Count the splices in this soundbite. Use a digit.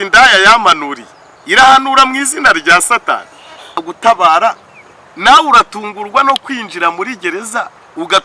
1